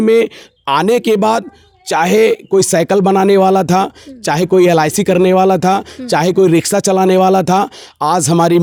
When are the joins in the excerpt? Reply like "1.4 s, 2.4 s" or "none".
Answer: none